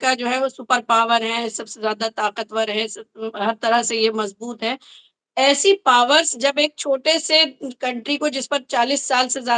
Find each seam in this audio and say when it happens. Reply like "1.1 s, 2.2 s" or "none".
none